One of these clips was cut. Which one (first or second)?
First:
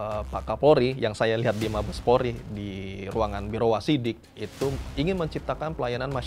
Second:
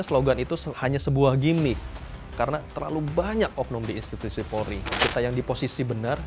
second